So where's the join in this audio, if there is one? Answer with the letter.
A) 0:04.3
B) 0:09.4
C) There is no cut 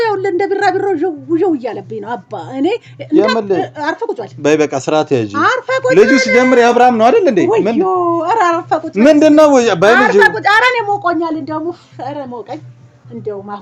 C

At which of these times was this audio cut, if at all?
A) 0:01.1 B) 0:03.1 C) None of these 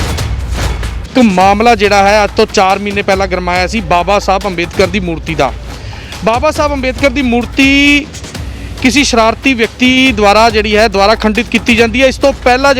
A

